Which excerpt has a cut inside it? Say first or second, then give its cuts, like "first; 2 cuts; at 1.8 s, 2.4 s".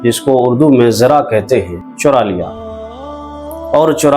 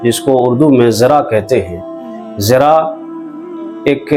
first; 1 cut; at 1.8 s